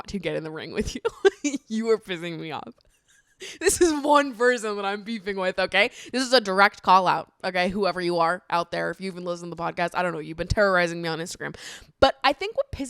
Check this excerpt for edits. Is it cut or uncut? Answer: uncut